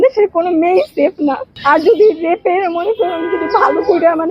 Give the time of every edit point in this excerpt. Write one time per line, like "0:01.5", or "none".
0:01.5